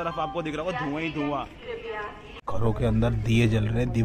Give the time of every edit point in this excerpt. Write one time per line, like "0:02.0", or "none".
0:02.4

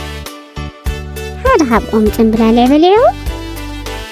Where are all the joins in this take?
0:01.0
0:03.2

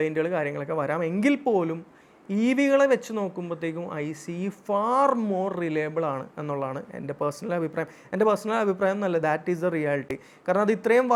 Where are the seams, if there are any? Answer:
none

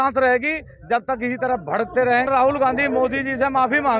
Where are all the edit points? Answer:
0:02.3

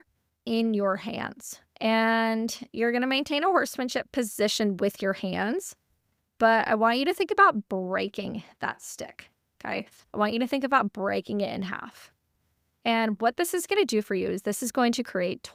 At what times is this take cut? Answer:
none

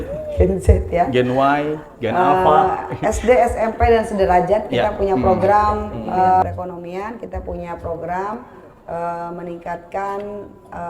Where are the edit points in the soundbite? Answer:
0:06.4

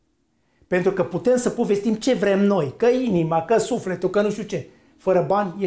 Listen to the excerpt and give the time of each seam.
none

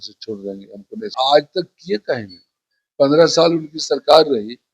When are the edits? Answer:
0:01.0

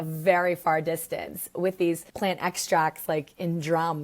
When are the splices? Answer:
0:02.1

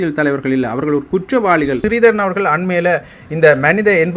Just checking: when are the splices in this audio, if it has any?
0:01.8

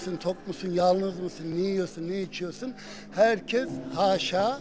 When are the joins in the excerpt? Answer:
none

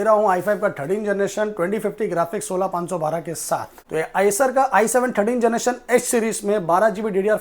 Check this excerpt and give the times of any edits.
0:03.8

